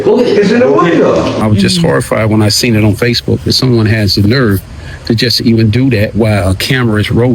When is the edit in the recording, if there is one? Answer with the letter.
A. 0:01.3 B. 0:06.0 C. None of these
A